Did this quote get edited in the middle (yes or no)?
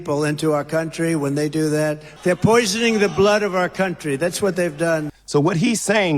yes